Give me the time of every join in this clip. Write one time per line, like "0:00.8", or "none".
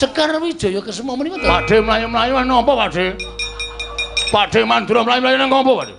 0:01.4